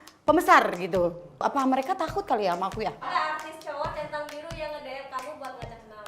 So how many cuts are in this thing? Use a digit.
2